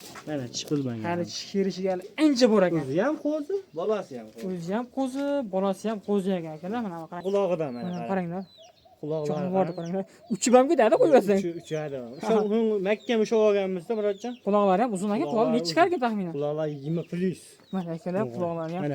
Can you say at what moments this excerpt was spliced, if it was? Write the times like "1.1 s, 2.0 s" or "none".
7.2 s